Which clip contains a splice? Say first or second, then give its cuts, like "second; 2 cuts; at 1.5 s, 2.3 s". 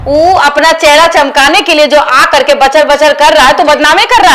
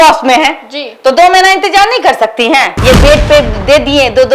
second; 1 cut; at 2.7 s